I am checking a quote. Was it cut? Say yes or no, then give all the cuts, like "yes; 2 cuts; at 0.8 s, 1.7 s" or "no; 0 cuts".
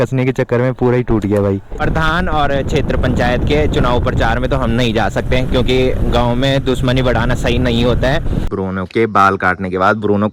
yes; 2 cuts; at 1.8 s, 8.5 s